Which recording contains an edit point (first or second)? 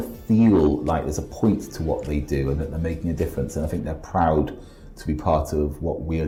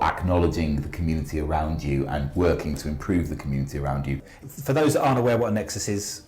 second